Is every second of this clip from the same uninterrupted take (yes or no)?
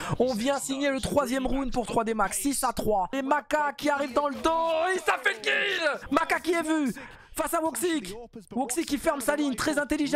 no